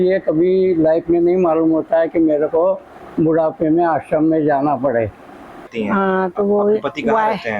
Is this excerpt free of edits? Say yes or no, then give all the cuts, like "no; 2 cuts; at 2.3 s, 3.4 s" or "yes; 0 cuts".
no; 1 cut; at 5.7 s